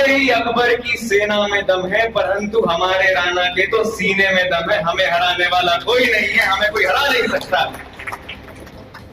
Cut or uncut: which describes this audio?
uncut